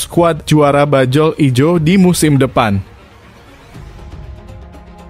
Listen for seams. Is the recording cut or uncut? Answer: cut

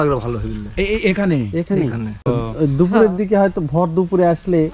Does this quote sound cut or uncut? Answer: cut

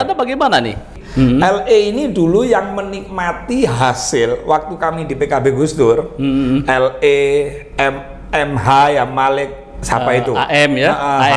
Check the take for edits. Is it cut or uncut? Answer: cut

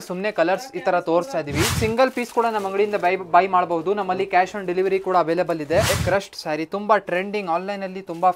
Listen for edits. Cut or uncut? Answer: cut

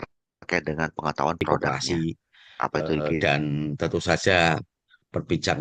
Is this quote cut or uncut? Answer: cut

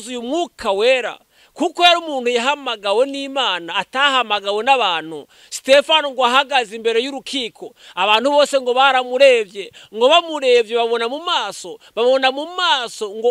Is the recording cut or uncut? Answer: uncut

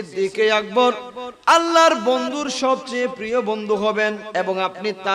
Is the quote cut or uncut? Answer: cut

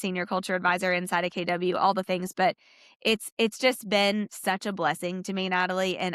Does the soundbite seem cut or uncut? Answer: uncut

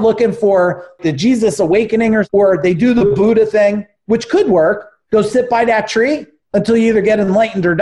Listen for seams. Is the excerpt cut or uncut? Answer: cut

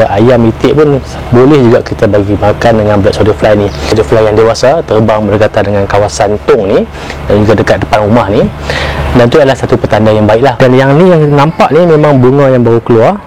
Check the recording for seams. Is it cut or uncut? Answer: cut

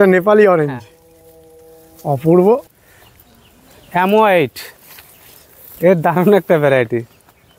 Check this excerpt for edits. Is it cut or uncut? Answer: cut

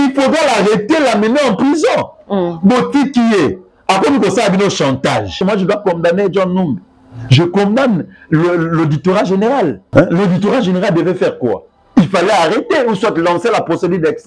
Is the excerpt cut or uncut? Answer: cut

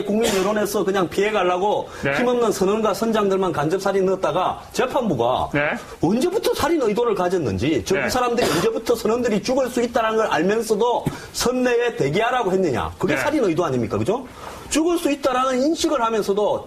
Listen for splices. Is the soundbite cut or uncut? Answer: cut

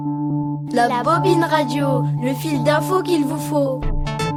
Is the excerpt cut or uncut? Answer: uncut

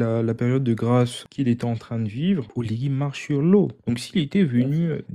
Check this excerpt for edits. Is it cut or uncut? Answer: cut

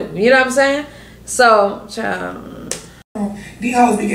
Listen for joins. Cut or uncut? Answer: cut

